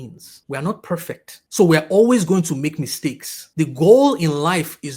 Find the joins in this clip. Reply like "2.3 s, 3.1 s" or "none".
none